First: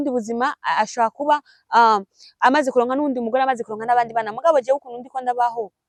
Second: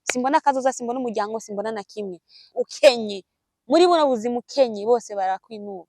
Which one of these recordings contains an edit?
second; 1 cut; at 2.4 s

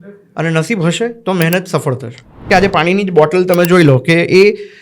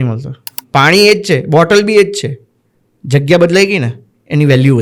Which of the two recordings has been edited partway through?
first; 1 cut; at 2.4 s

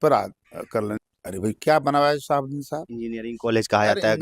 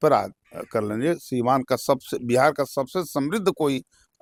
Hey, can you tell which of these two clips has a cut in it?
first; 1 cut; at 1.0 s

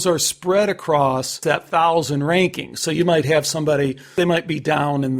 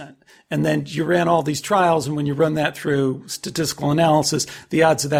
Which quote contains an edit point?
first; 2 cuts; at 1.4 s, 4.1 s

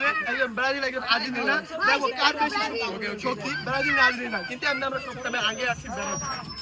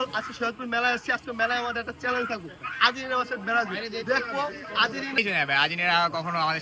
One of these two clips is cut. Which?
second; 1 cut; at 5.1 s

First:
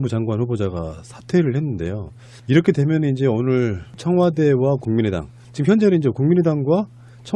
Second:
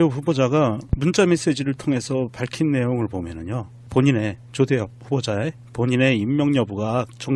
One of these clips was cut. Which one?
second; 1 cut; at 1.9 s

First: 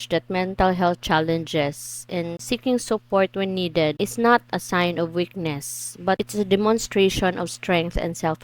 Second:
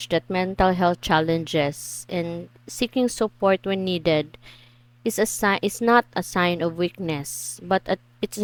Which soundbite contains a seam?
first; 3 cuts; at 2.4 s, 4.0 s, 6.2 s

